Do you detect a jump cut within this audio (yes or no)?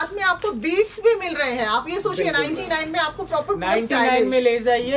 no